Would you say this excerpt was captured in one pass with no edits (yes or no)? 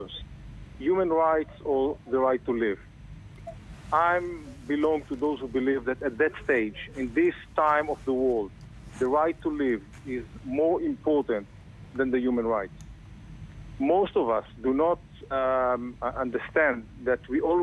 yes